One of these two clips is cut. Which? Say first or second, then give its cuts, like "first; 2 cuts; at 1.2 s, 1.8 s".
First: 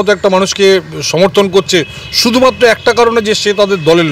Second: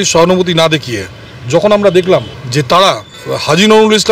second; 2 cuts; at 2.4 s, 3.1 s